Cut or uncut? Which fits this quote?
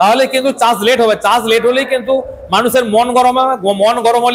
uncut